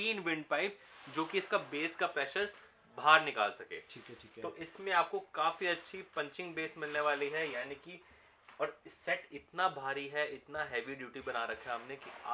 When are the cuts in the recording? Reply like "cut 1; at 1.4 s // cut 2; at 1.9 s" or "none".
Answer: none